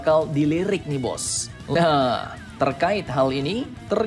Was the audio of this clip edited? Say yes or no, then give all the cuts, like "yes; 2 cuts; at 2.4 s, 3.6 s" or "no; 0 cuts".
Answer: yes; 1 cut; at 1.8 s